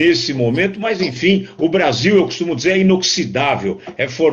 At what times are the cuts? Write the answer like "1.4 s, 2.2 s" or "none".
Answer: 1.8 s